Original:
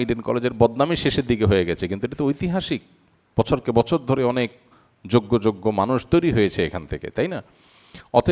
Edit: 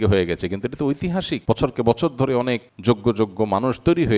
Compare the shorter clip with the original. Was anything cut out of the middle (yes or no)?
yes